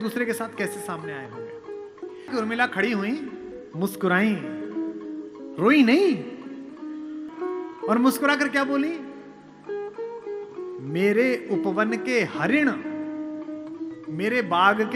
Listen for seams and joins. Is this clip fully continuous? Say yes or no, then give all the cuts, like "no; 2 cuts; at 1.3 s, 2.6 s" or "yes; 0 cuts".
no; 1 cut; at 7.3 s